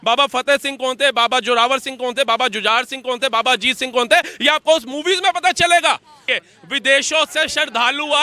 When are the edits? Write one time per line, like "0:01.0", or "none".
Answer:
0:06.2